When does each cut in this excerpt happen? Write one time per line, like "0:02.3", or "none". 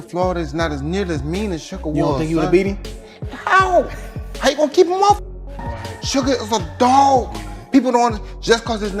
none